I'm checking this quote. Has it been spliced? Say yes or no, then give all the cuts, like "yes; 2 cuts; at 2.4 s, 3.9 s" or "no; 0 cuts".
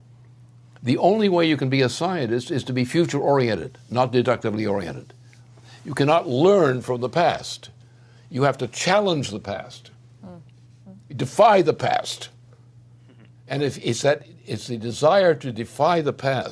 yes; 1 cut; at 2.1 s